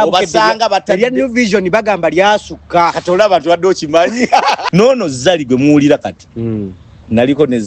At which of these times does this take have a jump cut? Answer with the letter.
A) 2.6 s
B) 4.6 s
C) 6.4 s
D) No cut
B